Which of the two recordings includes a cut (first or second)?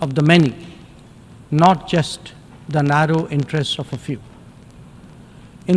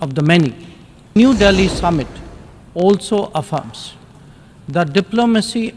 second